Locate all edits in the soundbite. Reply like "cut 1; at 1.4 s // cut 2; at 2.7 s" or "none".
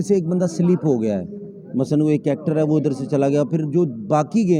none